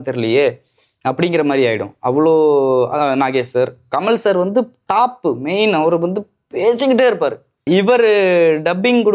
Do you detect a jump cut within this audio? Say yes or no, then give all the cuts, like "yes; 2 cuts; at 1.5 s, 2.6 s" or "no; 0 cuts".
yes; 1 cut; at 7.6 s